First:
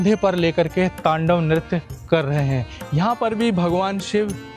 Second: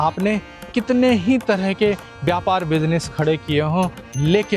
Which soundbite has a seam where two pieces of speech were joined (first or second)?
first